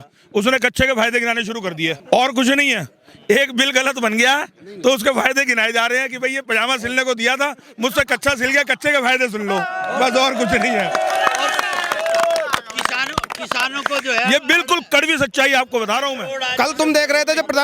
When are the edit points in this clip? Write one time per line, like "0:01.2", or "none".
0:02.0
0:16.3